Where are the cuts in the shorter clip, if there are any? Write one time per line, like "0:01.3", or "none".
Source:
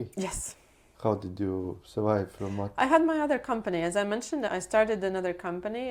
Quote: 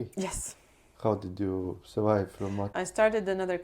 0:02.7